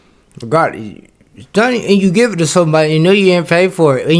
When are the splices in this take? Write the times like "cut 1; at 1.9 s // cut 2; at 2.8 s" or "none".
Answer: none